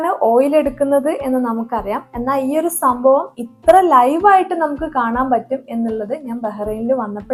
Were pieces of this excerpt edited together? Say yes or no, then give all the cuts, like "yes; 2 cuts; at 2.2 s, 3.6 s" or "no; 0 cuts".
no; 0 cuts